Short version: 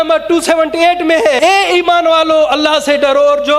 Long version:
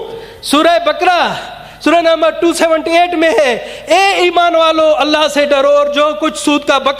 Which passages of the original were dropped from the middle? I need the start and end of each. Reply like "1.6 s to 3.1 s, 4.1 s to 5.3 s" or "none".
3.5 s to 3.9 s